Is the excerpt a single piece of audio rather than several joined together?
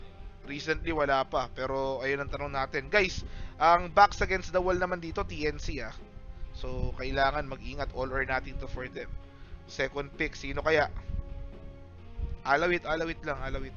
no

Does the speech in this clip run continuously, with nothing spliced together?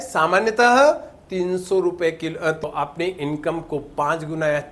no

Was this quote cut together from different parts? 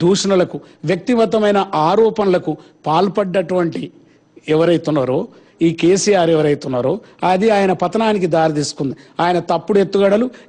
no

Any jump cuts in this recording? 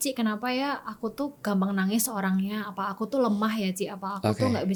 no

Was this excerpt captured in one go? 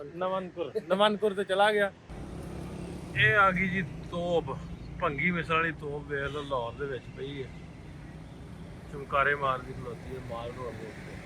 no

